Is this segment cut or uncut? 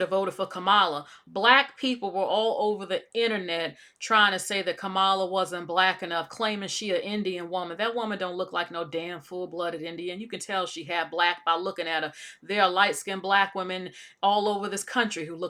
uncut